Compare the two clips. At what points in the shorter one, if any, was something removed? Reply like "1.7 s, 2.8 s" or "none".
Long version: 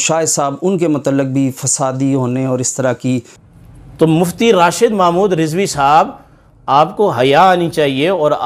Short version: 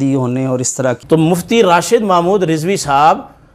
1.0 s

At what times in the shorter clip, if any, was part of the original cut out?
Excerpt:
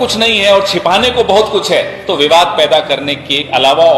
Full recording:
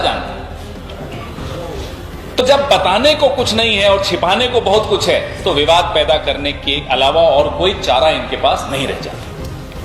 none

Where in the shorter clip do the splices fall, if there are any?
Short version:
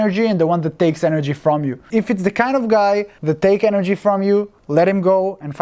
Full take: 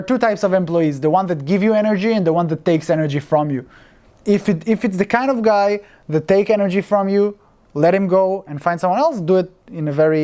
1.9 s, 3.1 s, 4.6 s

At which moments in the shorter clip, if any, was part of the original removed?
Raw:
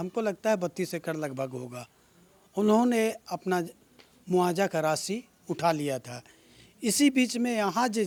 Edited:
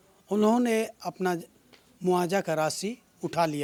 none

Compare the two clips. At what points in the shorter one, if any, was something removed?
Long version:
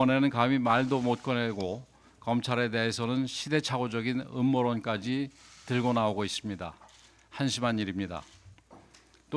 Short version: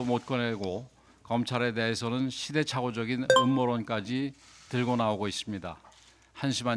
none

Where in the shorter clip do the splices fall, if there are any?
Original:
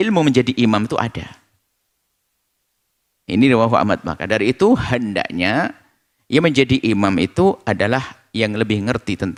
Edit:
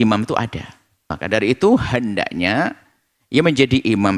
1.1 s

